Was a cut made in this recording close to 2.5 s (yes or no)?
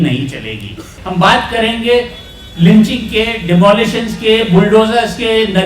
no